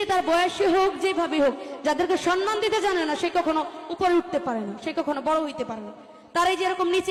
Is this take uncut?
yes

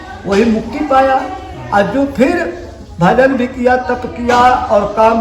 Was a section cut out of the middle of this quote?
no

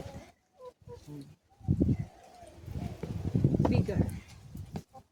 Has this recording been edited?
no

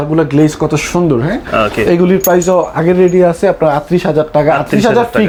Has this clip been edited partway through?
no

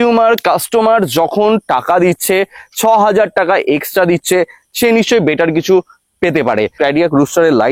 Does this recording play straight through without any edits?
no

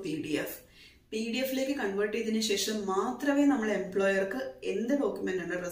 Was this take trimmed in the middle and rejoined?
no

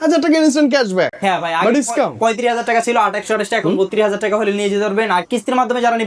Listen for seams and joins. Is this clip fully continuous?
yes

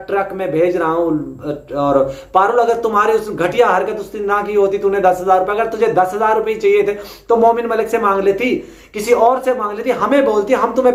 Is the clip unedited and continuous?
yes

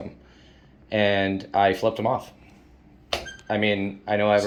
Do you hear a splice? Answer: no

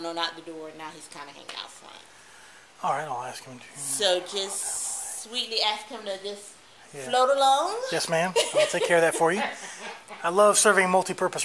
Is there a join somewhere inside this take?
no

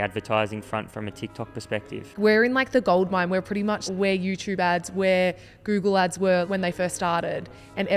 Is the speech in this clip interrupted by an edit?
yes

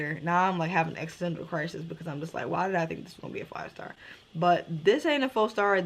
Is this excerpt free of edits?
yes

